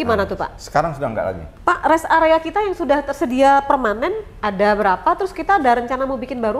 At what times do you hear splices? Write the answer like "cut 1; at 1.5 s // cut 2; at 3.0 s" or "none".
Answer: cut 1; at 1.5 s

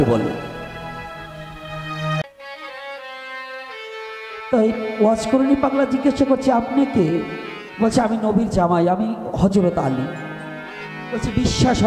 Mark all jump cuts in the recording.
cut 1; at 2.2 s

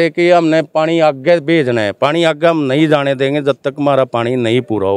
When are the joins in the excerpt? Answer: none

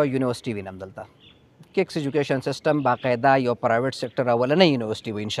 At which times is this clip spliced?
none

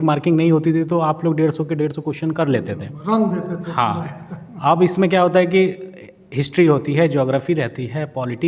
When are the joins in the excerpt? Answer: none

